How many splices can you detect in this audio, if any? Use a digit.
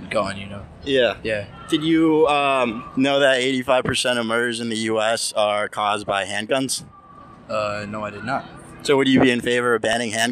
0